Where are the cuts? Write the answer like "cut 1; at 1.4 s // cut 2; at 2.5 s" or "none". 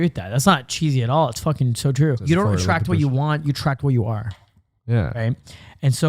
cut 1; at 2.2 s

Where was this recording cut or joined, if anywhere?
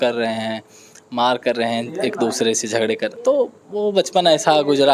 none

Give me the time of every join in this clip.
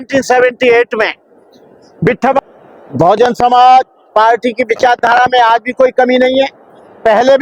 cut 1; at 2.4 s

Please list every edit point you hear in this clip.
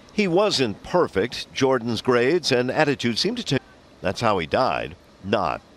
none

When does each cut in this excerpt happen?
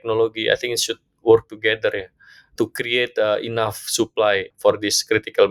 none

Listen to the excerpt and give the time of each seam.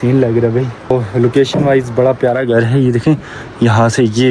cut 1; at 0.9 s

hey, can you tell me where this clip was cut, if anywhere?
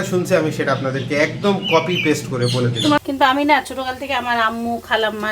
cut 1; at 3.0 s

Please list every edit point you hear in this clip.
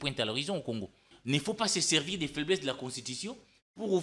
cut 1; at 1.1 s

